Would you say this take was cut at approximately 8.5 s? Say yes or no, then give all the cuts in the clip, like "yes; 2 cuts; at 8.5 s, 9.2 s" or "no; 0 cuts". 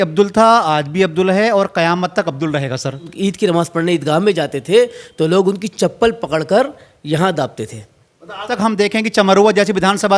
yes; 2 cuts; at 3.1 s, 8.5 s